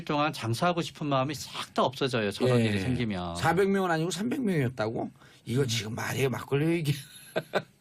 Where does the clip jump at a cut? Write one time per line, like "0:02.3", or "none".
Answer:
0:06.7